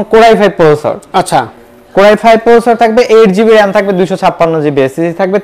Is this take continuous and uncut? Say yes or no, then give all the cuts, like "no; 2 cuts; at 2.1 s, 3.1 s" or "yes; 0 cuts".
yes; 0 cuts